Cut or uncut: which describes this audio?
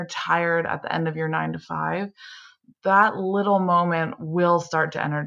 uncut